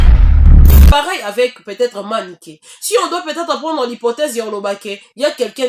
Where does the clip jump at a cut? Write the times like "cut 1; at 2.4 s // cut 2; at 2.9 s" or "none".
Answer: cut 1; at 0.9 s